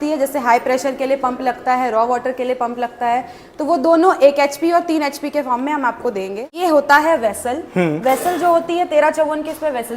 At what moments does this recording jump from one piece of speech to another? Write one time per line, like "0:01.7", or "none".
0:06.6